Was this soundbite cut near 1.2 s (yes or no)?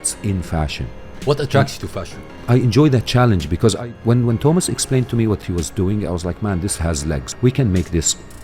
yes